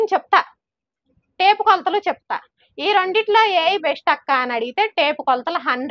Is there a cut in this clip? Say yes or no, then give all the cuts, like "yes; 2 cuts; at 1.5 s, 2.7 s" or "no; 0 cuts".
no; 0 cuts